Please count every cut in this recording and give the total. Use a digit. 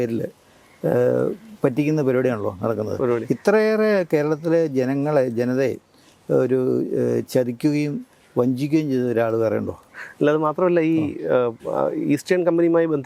0